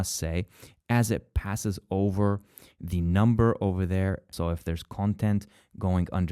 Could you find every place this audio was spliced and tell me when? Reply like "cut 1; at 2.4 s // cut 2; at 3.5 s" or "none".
cut 1; at 4.3 s

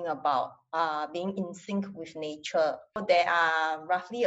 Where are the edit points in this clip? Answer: cut 1; at 3.0 s

